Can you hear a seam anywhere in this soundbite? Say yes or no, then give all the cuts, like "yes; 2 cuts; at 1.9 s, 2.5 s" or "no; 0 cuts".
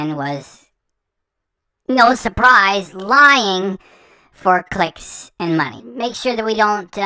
yes; 1 cut; at 5.8 s